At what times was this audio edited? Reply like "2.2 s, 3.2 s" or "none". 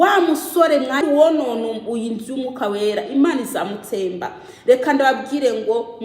1.0 s